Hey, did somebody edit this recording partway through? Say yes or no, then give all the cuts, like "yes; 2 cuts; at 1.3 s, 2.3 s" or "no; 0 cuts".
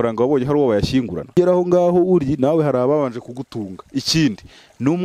yes; 1 cut; at 1.3 s